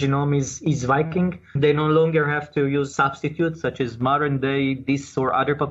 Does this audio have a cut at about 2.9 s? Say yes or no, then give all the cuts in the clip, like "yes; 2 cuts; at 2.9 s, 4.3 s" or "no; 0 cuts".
yes; 2 cuts; at 1.6 s, 2.9 s